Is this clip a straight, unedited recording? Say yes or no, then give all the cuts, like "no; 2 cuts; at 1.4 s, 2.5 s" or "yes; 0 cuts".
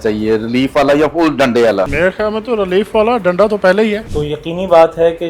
no; 2 cuts; at 1.9 s, 4.1 s